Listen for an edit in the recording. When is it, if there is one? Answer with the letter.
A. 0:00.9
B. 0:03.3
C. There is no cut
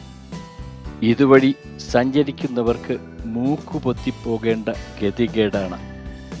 A